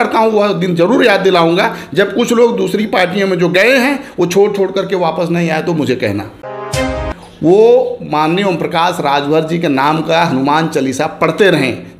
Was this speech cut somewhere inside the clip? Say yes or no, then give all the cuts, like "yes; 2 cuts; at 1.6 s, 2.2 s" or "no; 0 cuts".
yes; 1 cut; at 6.9 s